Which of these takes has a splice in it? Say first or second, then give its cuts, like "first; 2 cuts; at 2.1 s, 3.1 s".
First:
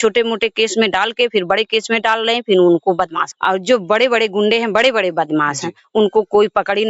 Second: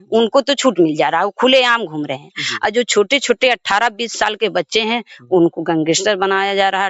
first; 1 cut; at 3.2 s